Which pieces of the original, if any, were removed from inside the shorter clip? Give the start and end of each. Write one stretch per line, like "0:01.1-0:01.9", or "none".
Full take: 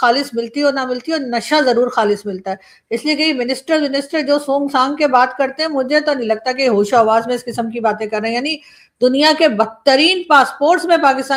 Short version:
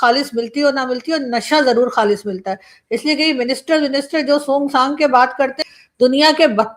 0:05.6-0:08.6

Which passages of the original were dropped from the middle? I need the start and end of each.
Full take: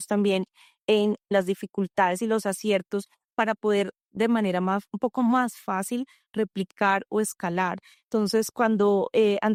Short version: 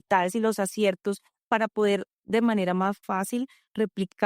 0:04.9-0:05.6

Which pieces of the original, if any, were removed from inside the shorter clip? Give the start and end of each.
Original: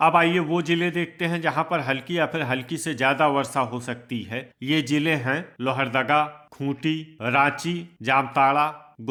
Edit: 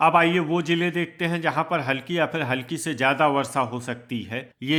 none

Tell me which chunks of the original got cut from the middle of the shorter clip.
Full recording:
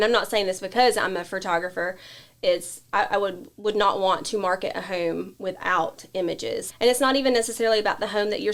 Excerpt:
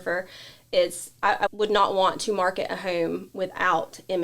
0:03.2-0:03.5

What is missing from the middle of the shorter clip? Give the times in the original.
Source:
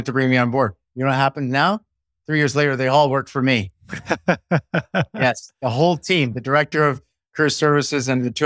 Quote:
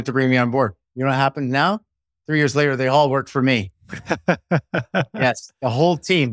none

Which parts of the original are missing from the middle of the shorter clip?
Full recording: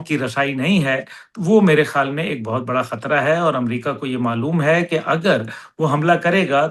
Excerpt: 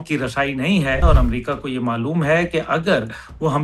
0:01.0-0:03.4

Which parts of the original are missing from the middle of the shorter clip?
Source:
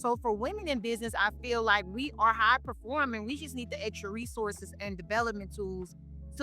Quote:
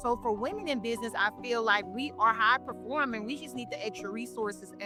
none

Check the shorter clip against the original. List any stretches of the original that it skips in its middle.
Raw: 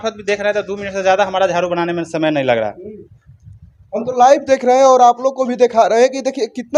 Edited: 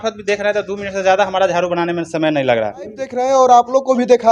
0:03.2-0:04.7

